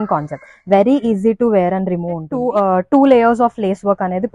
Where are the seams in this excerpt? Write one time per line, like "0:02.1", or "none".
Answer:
0:02.3